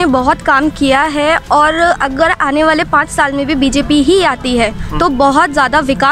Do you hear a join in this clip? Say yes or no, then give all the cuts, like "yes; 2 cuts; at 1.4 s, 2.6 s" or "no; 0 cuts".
no; 0 cuts